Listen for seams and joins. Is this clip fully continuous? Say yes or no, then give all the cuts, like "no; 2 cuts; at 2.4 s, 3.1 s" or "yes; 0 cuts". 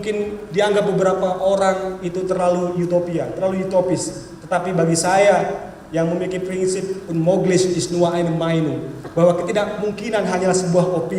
yes; 0 cuts